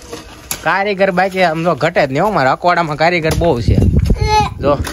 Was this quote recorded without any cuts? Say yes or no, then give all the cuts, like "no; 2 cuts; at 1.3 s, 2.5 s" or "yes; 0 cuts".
yes; 0 cuts